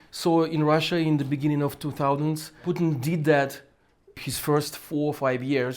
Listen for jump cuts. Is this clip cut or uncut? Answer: cut